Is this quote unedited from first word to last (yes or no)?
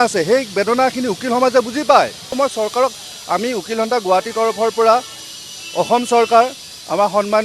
no